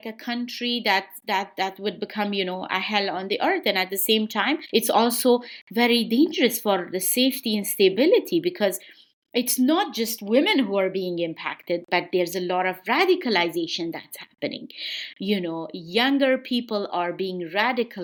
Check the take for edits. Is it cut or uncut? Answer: uncut